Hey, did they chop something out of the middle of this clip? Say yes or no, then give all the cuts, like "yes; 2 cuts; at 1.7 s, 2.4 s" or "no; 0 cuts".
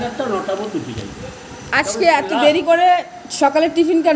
no; 0 cuts